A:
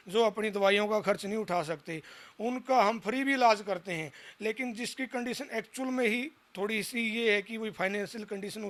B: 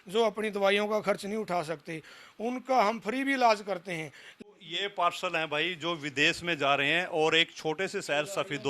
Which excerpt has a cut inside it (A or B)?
B